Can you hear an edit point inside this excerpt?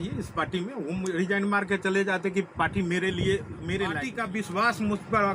yes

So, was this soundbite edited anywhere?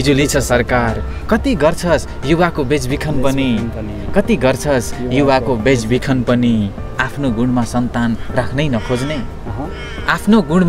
no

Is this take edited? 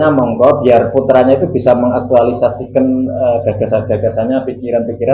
no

